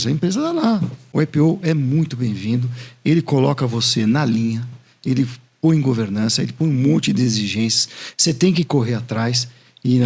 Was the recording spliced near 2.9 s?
no; 1 cut; at 1.0 s

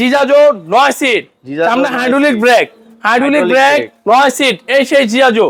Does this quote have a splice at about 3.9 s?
no; 0 cuts

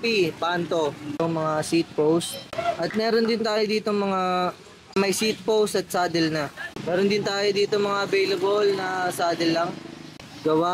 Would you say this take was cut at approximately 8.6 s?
no; 3 cuts; at 1.2 s, 2.4 s, 6.6 s

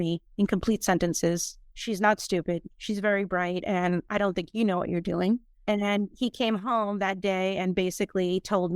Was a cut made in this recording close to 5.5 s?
yes; 1 cut; at 5.5 s

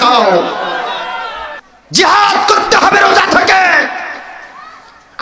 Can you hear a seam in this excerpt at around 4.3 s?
no; 1 cut; at 1.6 s

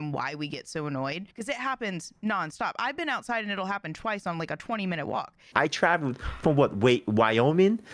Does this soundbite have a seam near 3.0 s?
no; 2 cuts; at 1.3 s, 5.5 s

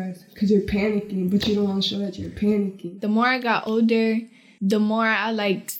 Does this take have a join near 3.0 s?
yes; 1 cut; at 3.0 s

